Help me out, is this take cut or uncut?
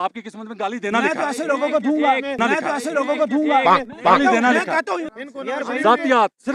uncut